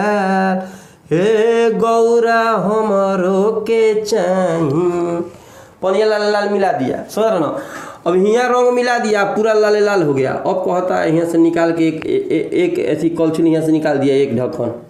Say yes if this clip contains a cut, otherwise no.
no